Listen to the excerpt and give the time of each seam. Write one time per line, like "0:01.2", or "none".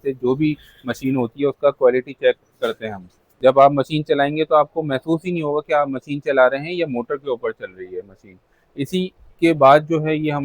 0:03.2